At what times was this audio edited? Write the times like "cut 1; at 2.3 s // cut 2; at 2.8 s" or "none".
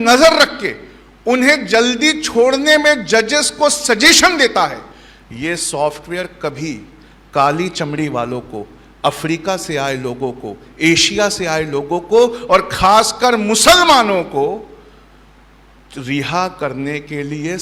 none